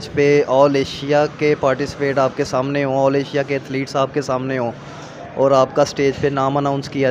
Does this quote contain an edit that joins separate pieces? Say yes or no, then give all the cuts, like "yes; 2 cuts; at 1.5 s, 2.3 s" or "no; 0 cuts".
no; 0 cuts